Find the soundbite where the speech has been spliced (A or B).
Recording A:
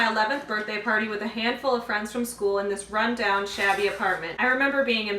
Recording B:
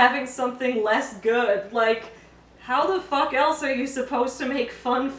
A